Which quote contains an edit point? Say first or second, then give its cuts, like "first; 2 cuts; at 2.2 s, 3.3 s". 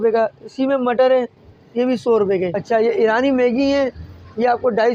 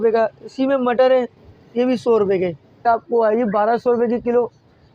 second; 1 cut; at 2.6 s